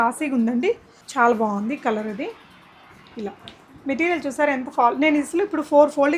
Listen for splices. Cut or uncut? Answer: uncut